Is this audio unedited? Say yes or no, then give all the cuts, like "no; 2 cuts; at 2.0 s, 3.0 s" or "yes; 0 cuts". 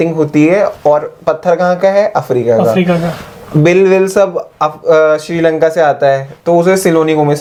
yes; 0 cuts